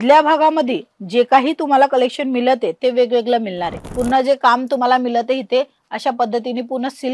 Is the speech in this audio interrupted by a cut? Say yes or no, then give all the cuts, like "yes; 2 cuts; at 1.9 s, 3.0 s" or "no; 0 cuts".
yes; 1 cut; at 3.9 s